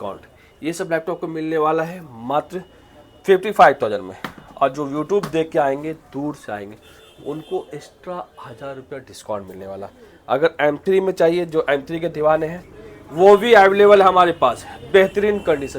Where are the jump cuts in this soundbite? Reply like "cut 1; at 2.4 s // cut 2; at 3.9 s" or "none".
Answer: none